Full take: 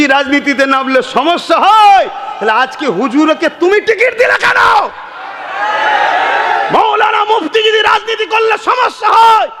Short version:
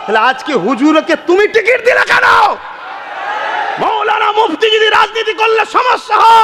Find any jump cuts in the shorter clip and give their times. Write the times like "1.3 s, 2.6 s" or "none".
3.4 s